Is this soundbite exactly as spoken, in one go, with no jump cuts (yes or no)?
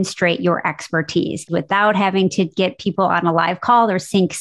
no